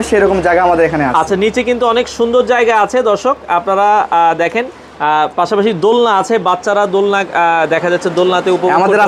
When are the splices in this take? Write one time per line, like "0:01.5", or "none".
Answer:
none